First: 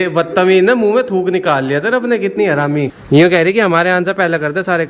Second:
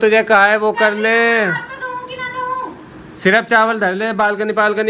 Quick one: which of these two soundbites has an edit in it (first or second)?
first